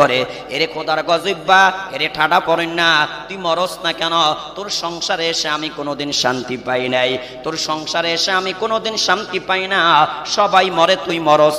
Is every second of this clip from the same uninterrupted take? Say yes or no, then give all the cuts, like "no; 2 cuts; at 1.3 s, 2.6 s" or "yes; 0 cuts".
yes; 0 cuts